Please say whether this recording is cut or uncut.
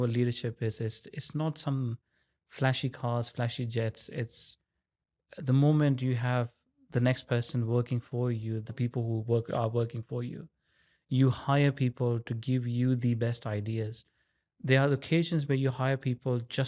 cut